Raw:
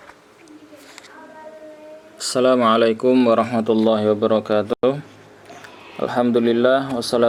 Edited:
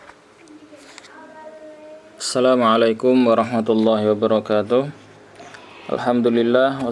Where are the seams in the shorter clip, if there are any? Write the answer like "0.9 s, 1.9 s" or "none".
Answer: 4.7 s